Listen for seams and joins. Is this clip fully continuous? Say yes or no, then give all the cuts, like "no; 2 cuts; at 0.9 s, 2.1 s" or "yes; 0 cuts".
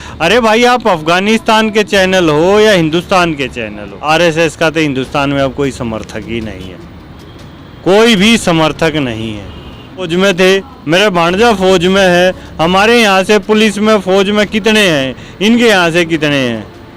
no; 2 cuts; at 3.9 s, 10.1 s